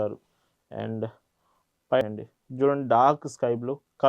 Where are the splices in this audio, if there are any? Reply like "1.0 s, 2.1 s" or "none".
2.0 s

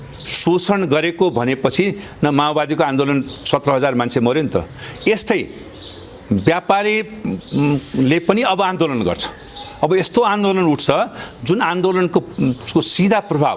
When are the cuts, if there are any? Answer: none

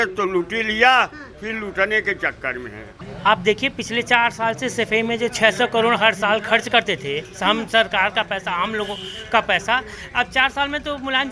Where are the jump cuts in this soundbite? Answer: 3.0 s

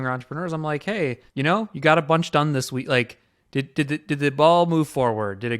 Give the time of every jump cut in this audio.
1.2 s

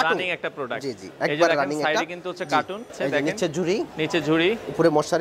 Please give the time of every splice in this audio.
3.0 s

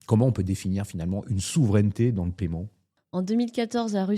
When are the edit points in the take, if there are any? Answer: 3.0 s

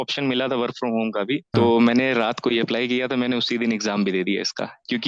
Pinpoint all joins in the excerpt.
1.5 s

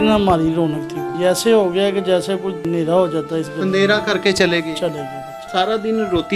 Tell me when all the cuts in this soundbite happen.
1.0 s, 2.7 s, 5.5 s

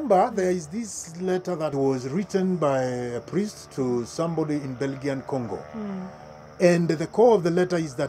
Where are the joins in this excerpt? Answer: 1.7 s

